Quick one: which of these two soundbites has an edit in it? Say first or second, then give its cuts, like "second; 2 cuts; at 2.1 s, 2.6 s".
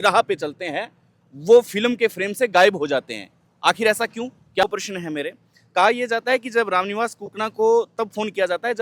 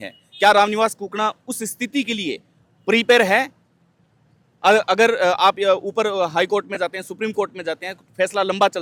first; 1 cut; at 4.6 s